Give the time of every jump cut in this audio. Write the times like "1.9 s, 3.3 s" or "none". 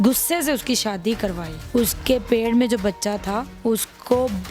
1.5 s, 3.5 s